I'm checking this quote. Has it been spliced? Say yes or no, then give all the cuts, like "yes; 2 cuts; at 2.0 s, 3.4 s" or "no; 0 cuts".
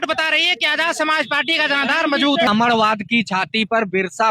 yes; 1 cut; at 2.5 s